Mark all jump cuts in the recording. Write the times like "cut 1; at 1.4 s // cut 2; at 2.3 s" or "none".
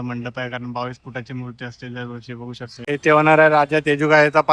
cut 1; at 2.7 s